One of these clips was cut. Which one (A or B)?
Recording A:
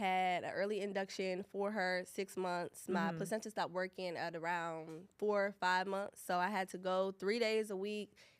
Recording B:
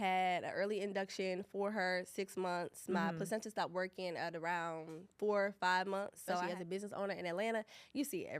B